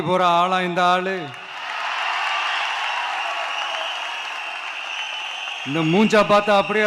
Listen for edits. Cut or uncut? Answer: uncut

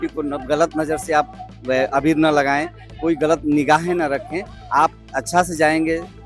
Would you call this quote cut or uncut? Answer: uncut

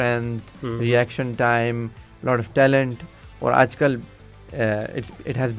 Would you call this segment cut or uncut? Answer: uncut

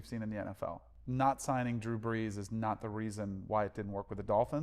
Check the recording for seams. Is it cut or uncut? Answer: cut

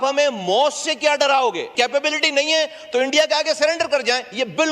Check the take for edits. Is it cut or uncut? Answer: cut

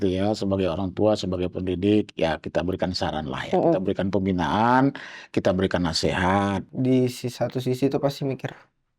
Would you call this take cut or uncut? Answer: cut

